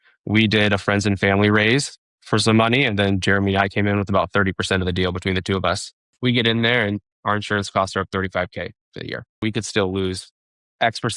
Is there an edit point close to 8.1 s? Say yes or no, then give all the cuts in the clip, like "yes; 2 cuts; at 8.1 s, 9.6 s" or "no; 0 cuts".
no; 3 cuts; at 2.2 s, 6.1 s, 9.4 s